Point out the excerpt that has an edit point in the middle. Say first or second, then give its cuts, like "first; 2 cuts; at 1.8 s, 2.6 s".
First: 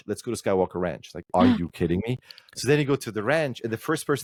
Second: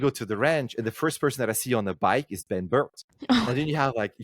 second; 1 cut; at 3.0 s